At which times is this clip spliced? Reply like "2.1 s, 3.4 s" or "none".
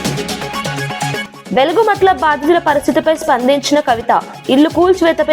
1.3 s